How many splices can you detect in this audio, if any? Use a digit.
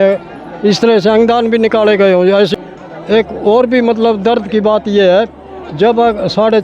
1